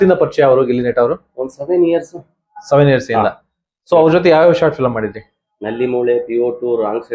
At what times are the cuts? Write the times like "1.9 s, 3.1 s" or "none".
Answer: none